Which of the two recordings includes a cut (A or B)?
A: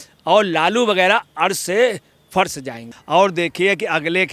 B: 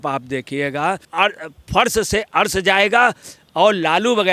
A